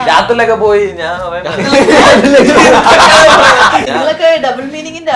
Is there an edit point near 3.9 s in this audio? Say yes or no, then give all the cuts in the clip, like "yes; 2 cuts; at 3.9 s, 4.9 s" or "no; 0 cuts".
yes; 1 cut; at 3.9 s